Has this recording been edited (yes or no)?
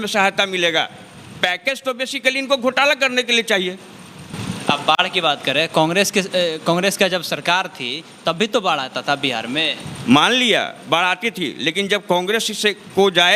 no